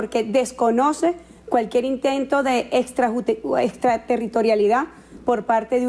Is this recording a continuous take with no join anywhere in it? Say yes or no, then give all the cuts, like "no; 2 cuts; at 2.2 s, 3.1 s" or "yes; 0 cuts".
no; 1 cut; at 2.7 s